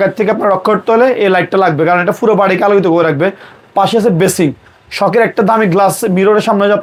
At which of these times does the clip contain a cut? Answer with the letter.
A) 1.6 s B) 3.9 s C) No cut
C